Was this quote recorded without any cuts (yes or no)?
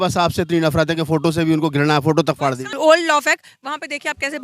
no